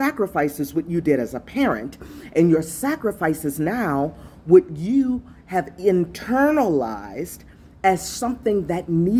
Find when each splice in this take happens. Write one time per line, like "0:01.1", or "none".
none